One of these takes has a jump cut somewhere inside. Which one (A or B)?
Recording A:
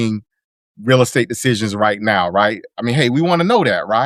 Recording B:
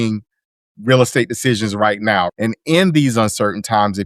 B